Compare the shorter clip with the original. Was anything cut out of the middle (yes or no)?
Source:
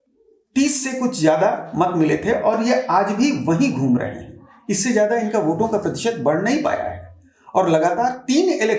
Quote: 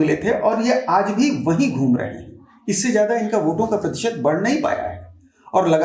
no